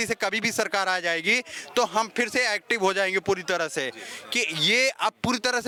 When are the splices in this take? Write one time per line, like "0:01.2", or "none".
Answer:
none